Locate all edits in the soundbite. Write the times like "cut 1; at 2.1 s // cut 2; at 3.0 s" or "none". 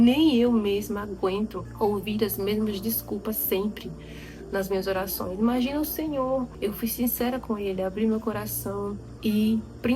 cut 1; at 1.6 s // cut 2; at 6.5 s // cut 3; at 9.0 s